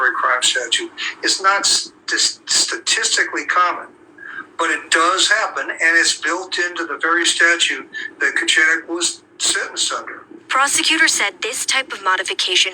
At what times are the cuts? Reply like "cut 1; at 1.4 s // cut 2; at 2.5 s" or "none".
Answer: cut 1; at 8.3 s